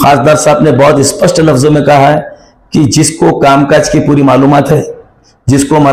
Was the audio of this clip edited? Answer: no; 0 cuts

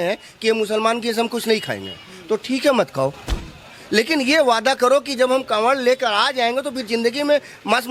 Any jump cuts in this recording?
no; 0 cuts

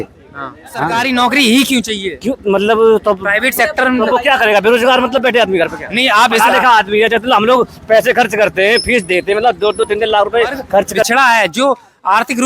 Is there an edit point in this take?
yes; 2 cuts; at 1.0 s, 11.0 s

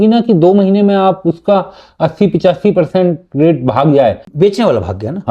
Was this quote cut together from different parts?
yes; 1 cut; at 4.2 s

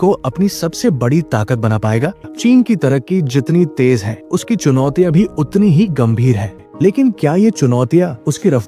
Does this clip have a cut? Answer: yes; 2 cuts; at 2.2 s, 6.6 s

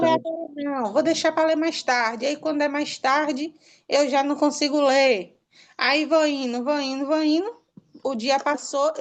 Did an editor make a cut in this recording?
no; 0 cuts

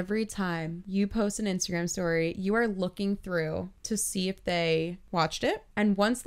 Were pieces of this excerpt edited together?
no; 0 cuts

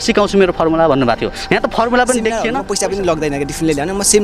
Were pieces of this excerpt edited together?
yes; 2 cuts; at 1.3 s, 2.5 s

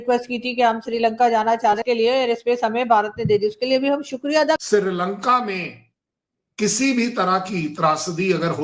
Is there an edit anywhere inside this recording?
yes; 2 cuts; at 1.8 s, 4.6 s

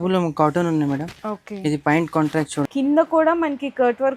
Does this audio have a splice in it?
yes; 1 cut; at 2.7 s

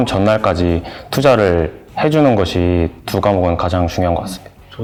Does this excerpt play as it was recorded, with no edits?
yes; 0 cuts

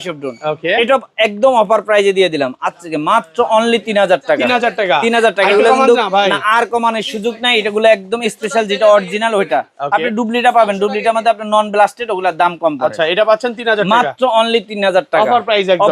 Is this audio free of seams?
yes; 0 cuts

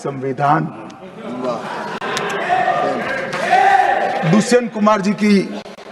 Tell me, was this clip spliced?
no; 0 cuts

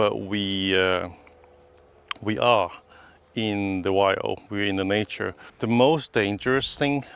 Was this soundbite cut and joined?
yes; 1 cut; at 5.4 s

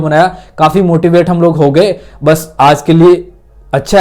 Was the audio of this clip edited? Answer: no; 0 cuts

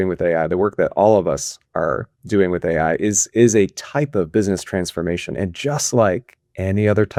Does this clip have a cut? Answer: no; 0 cuts

